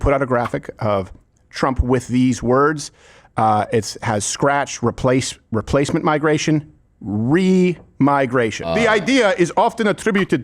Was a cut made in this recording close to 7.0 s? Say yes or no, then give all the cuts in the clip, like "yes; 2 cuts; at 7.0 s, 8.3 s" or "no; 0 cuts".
no; 1 cut; at 8.7 s